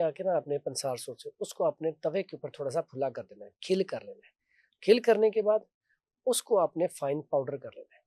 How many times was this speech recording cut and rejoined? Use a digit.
0